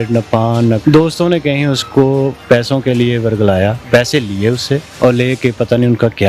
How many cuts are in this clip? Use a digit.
4